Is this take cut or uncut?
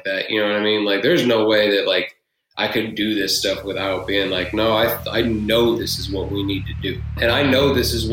cut